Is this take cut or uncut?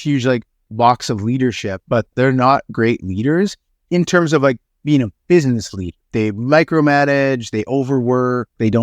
cut